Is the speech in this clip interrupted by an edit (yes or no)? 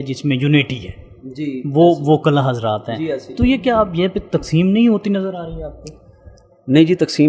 no